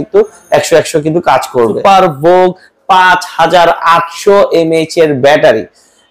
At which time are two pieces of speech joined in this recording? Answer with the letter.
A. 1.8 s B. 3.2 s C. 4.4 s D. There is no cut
A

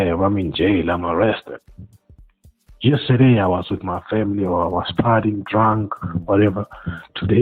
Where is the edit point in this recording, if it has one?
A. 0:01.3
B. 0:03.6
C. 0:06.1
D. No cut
D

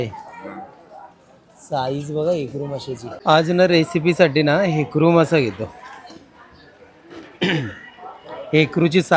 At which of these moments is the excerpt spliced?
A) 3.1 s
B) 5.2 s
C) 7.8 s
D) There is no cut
A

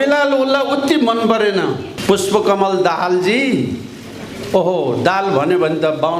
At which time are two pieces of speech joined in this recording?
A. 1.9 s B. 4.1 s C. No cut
A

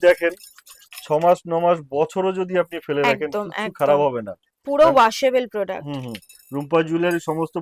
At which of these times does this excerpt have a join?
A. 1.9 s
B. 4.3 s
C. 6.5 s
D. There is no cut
D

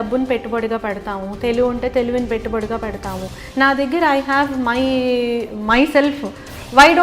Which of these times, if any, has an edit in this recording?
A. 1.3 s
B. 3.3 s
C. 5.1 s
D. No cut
B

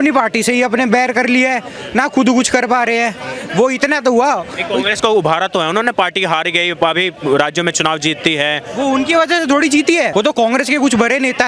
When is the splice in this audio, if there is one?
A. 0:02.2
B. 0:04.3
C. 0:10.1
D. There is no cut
C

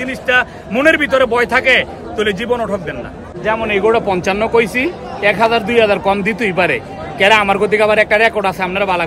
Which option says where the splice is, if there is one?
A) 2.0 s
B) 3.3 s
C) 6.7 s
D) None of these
B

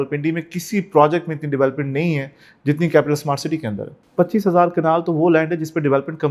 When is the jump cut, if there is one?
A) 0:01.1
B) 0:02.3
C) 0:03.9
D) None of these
C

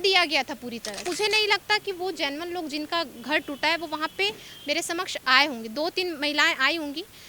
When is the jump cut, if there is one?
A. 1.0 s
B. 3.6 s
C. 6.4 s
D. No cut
A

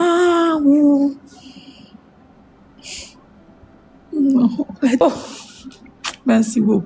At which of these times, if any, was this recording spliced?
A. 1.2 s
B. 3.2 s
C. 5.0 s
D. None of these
C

